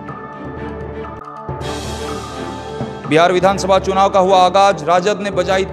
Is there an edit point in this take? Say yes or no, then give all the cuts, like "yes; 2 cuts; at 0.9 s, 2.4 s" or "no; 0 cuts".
yes; 2 cuts; at 1.3 s, 3.0 s